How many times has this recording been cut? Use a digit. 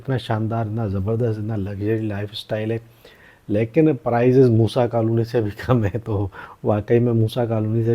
0